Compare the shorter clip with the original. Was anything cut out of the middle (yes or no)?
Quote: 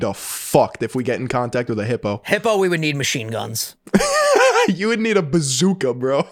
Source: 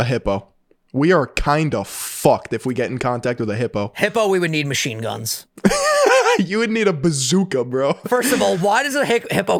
no